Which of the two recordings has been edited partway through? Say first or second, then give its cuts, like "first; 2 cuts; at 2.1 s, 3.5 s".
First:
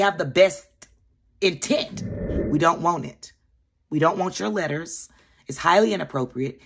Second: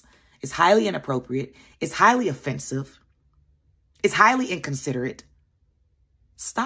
first; 1 cut; at 2.1 s